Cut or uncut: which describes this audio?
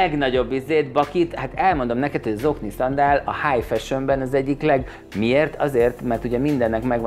uncut